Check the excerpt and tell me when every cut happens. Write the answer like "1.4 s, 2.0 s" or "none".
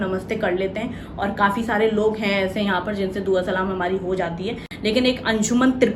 none

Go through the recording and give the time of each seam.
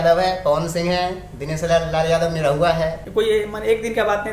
3.0 s

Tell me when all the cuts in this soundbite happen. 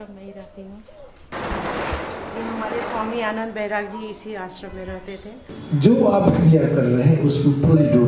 1.0 s, 5.5 s

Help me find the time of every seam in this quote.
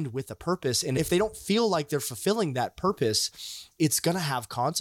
1.0 s, 3.6 s

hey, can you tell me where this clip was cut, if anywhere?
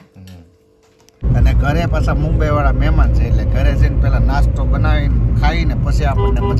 1.2 s

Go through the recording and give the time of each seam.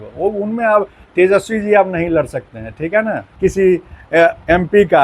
3.2 s

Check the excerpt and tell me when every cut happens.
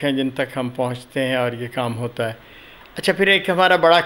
none

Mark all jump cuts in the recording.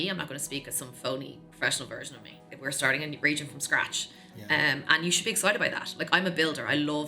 2.4 s

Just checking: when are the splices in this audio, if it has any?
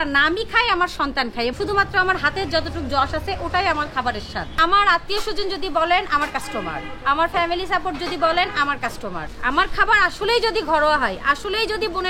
1.5 s, 4.5 s, 9.3 s

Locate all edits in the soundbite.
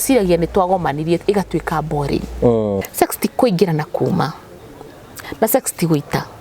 2.9 s

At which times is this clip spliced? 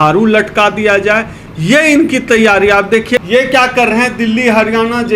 3.2 s

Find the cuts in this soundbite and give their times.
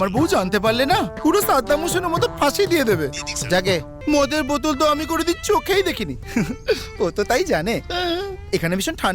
3.9 s

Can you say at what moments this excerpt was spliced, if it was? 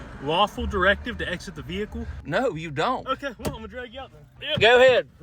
2.2 s, 4.3 s

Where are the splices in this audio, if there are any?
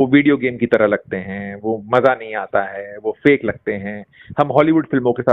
none

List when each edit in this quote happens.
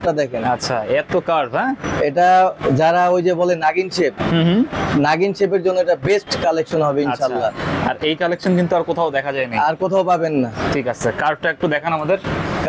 none

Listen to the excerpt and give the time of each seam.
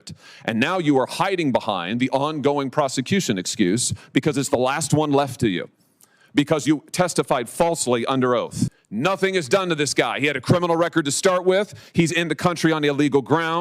8.8 s

